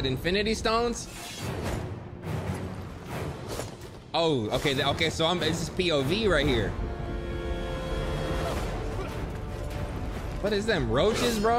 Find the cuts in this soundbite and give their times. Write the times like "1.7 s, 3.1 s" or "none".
none